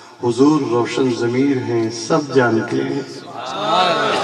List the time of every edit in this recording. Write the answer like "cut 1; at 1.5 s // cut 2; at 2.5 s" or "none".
none